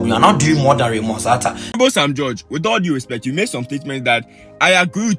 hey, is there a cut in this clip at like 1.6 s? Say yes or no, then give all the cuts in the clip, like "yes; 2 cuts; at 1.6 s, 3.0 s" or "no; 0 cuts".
yes; 1 cut; at 1.6 s